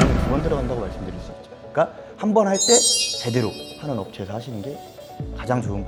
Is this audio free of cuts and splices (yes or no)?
yes